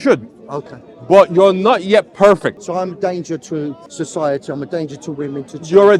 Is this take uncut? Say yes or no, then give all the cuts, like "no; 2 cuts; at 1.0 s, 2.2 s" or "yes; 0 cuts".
no; 2 cuts; at 2.6 s, 3.8 s